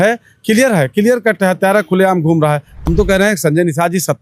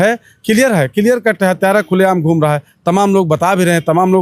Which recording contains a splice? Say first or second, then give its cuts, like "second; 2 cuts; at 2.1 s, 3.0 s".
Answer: first; 1 cut; at 2.7 s